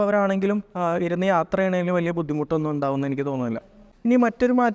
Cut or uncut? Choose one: cut